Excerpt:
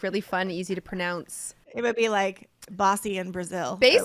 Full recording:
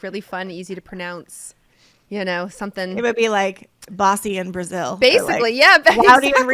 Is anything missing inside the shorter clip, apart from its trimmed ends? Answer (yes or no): yes